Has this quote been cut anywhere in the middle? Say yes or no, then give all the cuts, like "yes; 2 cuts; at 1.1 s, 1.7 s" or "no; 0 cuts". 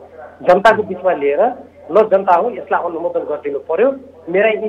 no; 0 cuts